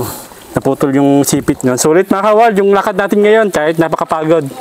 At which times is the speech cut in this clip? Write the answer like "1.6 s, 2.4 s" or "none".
1.6 s